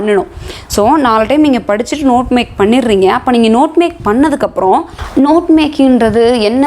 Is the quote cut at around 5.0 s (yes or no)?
yes